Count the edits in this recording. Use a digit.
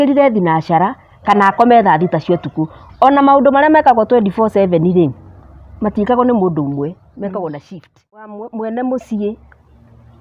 1